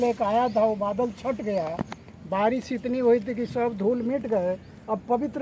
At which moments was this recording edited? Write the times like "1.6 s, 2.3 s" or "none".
none